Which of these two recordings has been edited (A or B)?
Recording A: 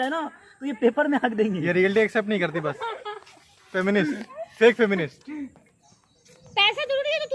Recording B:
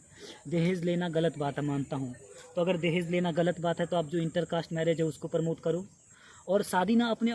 A